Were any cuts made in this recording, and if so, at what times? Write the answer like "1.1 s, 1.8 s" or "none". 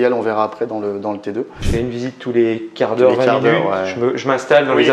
1.6 s